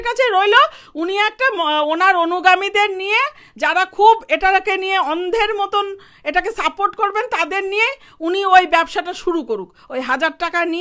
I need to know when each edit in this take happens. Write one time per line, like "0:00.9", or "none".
none

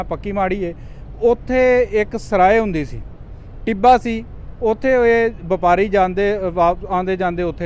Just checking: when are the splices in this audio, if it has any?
none

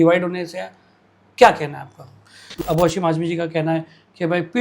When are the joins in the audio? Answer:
0:02.5

